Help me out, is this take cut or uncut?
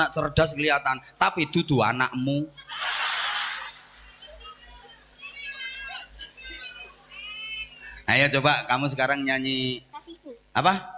uncut